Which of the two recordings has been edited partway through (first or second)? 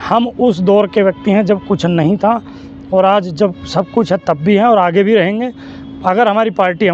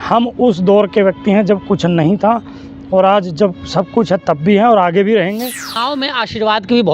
second